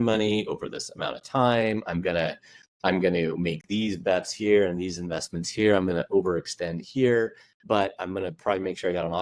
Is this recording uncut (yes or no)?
yes